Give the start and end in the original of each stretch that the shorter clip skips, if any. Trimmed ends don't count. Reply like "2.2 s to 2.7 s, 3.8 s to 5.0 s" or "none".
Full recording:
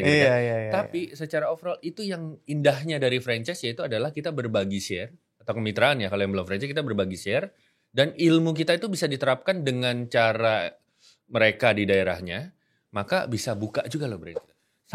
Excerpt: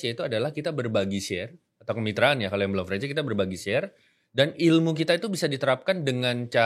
none